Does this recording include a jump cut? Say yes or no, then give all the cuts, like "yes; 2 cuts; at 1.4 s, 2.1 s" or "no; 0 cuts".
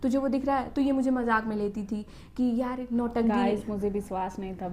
no; 0 cuts